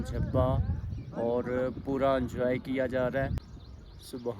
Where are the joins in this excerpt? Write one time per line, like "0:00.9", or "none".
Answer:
0:03.3